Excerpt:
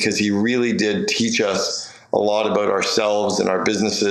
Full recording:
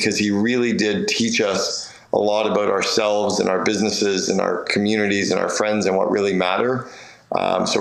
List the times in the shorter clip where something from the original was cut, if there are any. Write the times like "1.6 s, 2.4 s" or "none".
none